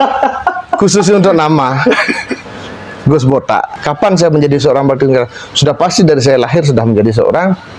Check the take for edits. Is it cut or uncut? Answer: cut